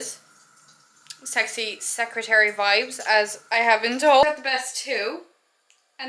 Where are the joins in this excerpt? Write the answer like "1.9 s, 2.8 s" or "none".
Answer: 4.2 s